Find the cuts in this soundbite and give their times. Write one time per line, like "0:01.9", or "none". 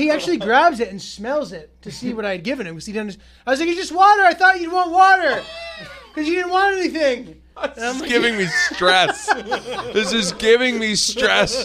none